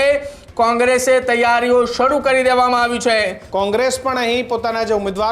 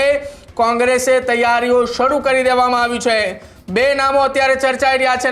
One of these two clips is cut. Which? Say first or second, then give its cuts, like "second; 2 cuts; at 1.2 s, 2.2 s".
first; 1 cut; at 3.4 s